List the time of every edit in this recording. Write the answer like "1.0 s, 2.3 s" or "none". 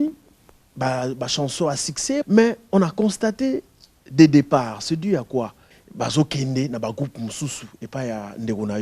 2.2 s, 5.8 s